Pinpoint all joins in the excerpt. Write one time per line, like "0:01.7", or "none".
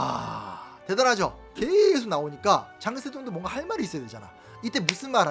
0:01.4